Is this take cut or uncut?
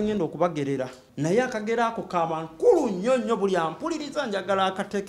cut